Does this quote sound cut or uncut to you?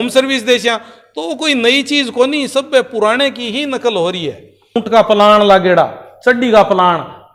uncut